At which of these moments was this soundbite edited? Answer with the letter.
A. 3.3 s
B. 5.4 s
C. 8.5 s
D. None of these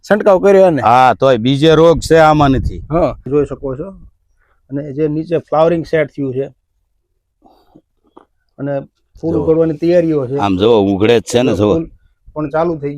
A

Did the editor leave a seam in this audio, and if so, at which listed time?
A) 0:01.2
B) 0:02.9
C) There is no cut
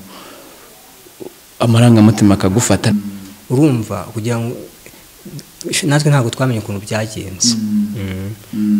B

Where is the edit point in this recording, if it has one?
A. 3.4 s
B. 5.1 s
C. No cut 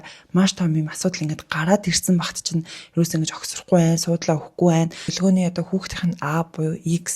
B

